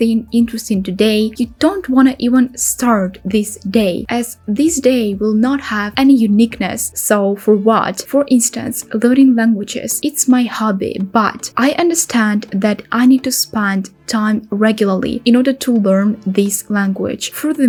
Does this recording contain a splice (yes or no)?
no